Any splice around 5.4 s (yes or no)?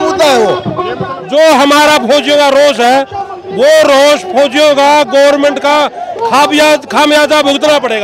no